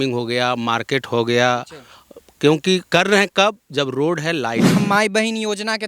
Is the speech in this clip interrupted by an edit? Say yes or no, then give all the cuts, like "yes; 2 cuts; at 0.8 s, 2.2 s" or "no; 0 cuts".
yes; 1 cut; at 4.8 s